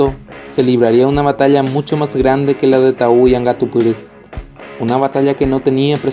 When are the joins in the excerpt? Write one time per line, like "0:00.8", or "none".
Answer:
none